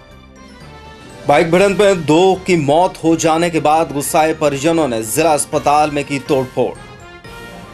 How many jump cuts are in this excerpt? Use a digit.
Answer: 1